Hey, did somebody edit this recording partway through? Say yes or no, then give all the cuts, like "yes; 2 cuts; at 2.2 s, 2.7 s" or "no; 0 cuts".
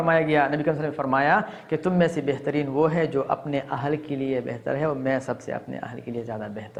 no; 0 cuts